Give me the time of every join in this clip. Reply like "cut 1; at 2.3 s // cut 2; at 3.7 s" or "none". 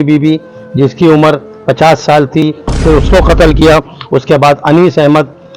cut 1; at 2.4 s